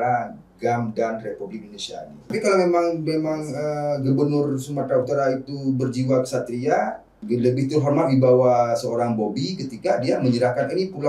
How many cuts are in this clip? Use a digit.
2